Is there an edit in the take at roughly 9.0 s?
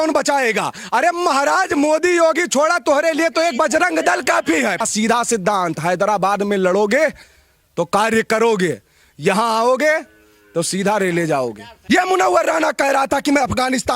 no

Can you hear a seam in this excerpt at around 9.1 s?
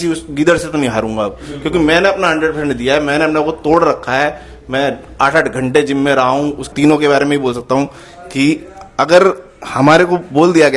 no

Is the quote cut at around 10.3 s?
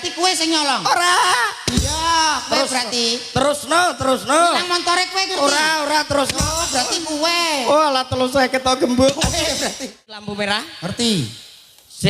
yes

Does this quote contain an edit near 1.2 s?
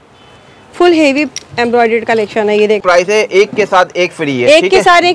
no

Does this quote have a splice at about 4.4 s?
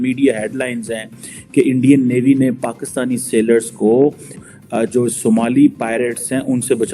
yes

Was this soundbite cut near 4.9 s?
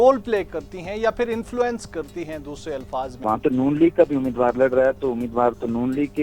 no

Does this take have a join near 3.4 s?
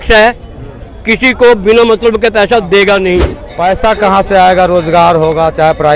yes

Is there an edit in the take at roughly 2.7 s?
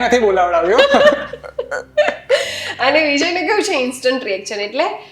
no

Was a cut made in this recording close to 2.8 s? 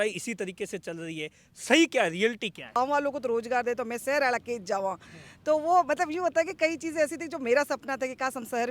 yes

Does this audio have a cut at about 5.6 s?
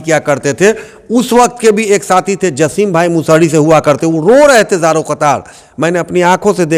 no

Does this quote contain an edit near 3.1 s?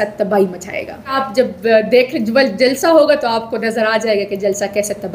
no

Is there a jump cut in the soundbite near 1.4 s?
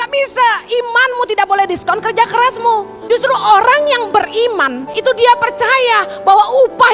no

